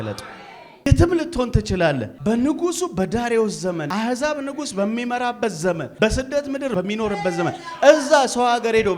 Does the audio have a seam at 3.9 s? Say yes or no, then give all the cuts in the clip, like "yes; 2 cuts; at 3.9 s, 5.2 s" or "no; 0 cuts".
yes; 5 cuts; at 0.9 s, 2.1 s, 3.9 s, 5.9 s, 6.7 s